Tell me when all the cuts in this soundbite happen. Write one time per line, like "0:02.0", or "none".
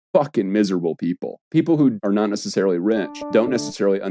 0:01.3
0:02.0
0:03.2